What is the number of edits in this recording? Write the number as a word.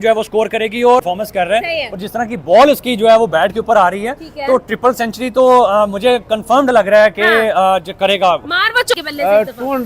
two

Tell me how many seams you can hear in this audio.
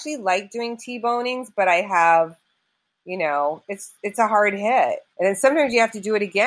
one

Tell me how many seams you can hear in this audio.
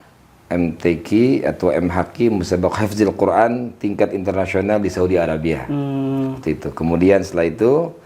zero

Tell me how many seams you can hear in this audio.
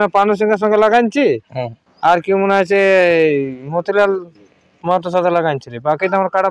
zero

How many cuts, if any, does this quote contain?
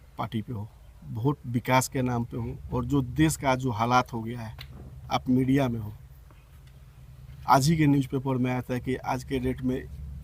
zero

